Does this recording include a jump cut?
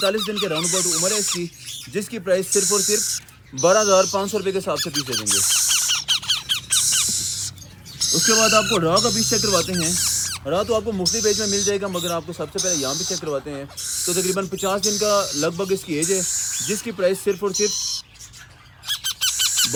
no; 0 cuts

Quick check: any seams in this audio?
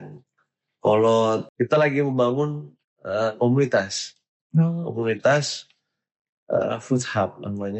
yes; 1 cut; at 1.5 s

